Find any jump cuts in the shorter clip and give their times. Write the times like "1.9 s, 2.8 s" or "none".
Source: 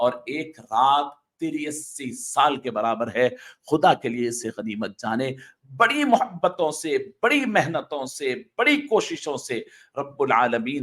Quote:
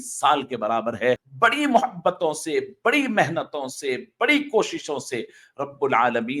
1.3 s

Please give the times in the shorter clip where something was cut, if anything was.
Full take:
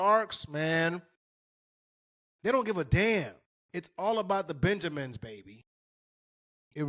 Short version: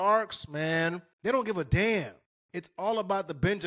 1.1 s

